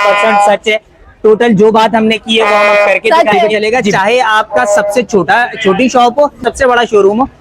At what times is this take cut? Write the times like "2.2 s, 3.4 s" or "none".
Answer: 3.5 s, 6.4 s